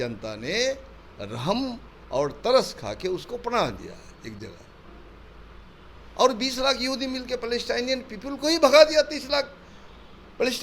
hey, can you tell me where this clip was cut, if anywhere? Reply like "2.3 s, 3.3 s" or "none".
none